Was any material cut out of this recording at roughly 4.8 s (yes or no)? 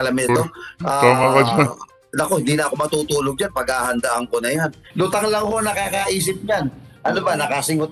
yes